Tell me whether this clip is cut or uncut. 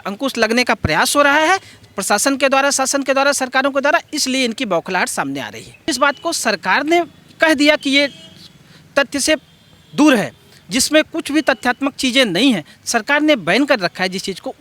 cut